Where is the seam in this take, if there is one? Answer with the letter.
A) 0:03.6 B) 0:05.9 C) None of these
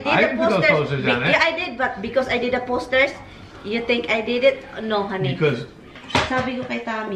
B